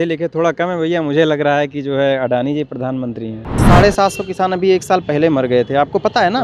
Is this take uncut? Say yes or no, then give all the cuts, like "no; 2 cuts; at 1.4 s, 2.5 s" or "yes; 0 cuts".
no; 1 cut; at 3.5 s